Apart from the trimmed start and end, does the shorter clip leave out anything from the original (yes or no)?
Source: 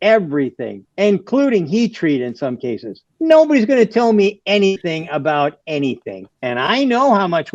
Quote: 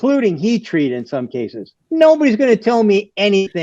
no